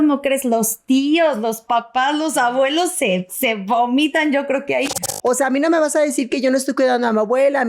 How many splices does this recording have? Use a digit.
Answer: 1